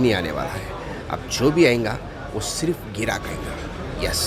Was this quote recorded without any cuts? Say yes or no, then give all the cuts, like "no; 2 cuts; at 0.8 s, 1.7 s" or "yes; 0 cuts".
yes; 0 cuts